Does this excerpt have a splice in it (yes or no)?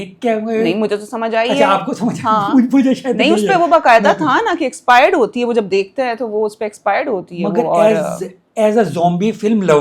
no